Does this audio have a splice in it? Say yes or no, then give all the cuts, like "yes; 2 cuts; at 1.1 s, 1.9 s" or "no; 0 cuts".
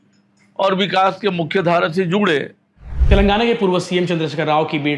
yes; 1 cut; at 2.9 s